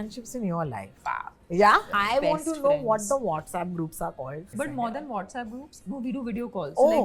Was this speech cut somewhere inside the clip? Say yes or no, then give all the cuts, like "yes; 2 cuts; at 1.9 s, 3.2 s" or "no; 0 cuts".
yes; 4 cuts; at 0.9 s, 1.9 s, 4.5 s, 5.8 s